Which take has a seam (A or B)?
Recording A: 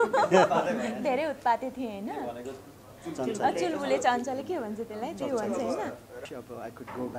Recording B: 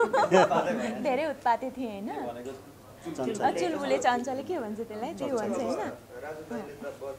A